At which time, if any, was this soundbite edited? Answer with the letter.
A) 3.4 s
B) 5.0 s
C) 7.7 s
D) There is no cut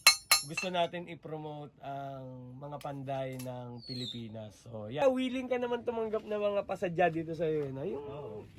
B